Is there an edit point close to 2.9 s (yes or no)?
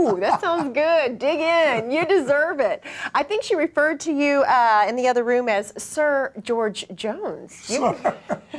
no